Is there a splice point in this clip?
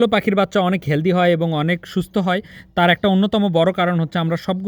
no; 0 cuts

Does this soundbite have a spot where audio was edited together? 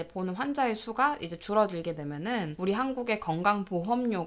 yes; 1 cut; at 2.5 s

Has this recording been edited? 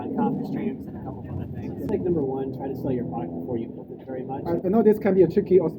yes; 2 cuts; at 1.9 s, 4.4 s

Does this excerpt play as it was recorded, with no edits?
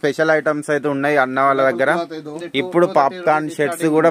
no; 1 cut; at 2.4 s

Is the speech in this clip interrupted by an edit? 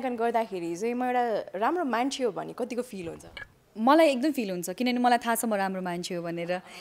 no; 0 cuts

